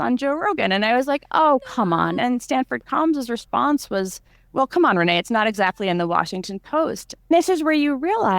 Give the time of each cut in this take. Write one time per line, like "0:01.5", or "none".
0:02.1
0:07.1